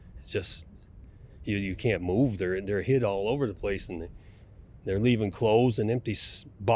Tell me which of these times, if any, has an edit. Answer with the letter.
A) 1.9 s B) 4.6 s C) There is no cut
C